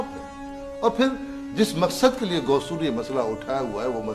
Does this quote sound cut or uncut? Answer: cut